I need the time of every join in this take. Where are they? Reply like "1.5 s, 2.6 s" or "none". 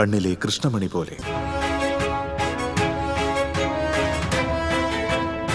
1.1 s